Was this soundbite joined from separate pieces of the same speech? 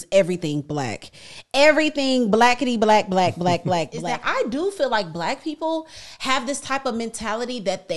yes; 1 cut; at 4.1 s

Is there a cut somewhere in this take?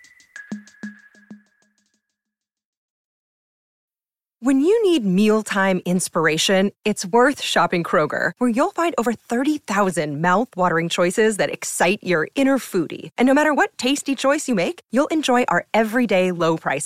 no; 0 cuts

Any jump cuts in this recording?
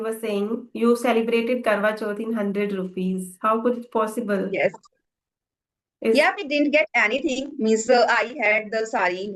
no; 0 cuts

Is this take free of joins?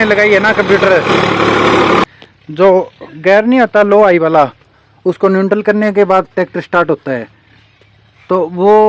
no; 1 cut; at 2.0 s

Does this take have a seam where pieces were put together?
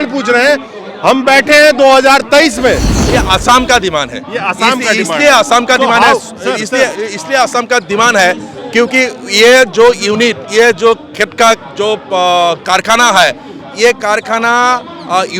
yes; 1 cut; at 3.0 s

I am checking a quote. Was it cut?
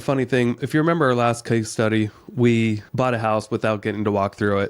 yes; 1 cut; at 2.8 s

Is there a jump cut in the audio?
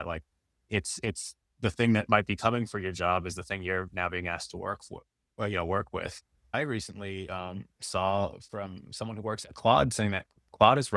yes; 1 cut; at 6.5 s

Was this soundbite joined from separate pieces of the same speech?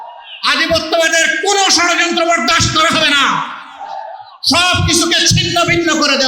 no; 0 cuts

